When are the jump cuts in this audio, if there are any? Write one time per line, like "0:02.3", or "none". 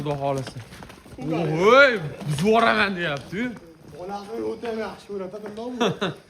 none

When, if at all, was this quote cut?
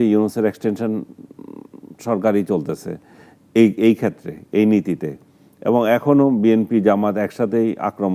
none

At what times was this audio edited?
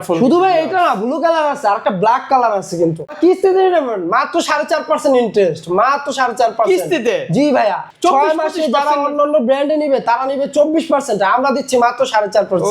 0:03.1
0:07.9

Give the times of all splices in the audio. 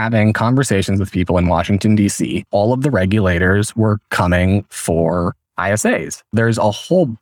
0:02.5
0:06.2

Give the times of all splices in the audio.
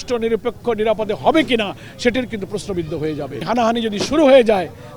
0:03.5

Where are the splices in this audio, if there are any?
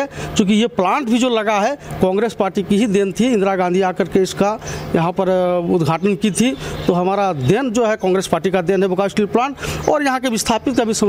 none

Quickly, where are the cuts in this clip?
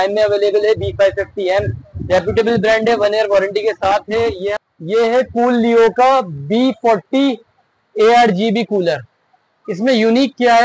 0:04.5

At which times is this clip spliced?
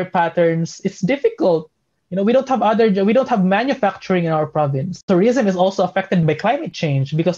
0:05.0
0:06.2

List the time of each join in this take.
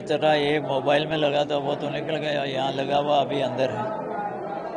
none

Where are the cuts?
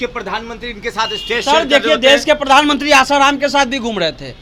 none

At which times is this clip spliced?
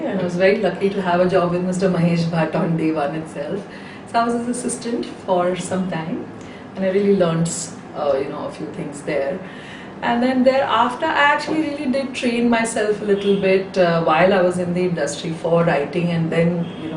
0:03.7

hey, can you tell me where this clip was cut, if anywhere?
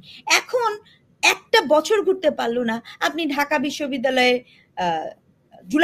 none

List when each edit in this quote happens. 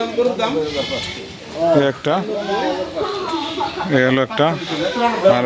none

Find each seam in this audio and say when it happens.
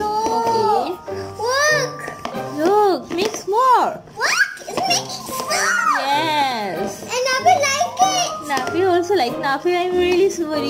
none

